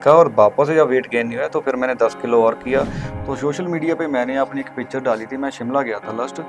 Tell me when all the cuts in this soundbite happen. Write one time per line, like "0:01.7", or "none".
0:03.0